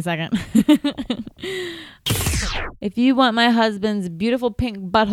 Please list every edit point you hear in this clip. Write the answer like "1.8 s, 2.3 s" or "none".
2.2 s